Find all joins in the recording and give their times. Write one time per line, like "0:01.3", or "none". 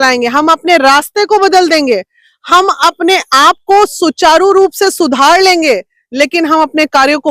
none